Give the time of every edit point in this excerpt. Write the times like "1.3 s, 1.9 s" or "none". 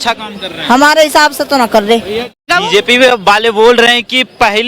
2.5 s